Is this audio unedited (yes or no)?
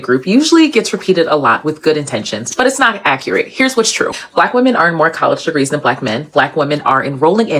yes